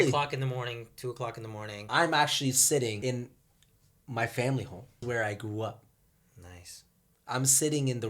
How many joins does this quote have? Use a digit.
3